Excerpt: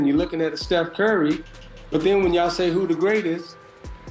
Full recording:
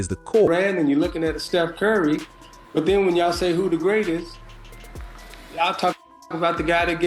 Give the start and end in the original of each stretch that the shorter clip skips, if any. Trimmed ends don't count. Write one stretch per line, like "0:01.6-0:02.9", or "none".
none